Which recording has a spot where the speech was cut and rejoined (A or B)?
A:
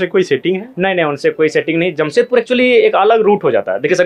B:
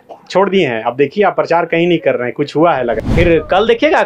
B